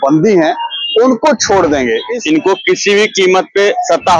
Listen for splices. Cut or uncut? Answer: cut